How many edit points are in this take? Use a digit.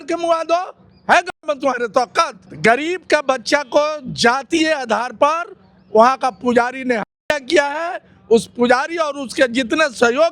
1